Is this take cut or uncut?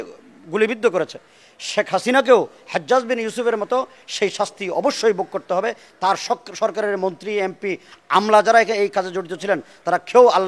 uncut